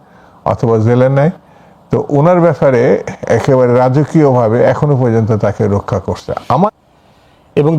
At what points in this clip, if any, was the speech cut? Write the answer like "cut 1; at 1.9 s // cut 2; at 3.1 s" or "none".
cut 1; at 6.7 s